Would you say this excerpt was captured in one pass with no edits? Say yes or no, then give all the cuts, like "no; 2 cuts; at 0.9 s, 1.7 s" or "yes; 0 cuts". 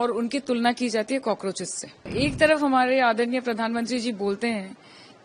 no; 1 cut; at 2.1 s